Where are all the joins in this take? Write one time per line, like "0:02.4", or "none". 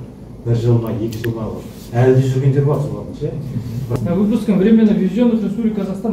0:03.9